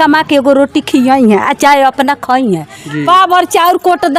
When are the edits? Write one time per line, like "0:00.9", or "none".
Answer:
none